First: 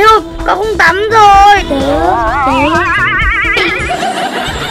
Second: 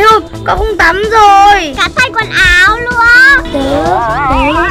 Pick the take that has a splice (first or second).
first